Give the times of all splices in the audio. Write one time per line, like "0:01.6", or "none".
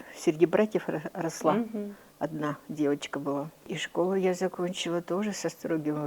0:03.7